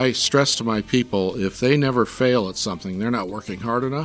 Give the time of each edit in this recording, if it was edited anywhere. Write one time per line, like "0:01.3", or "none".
none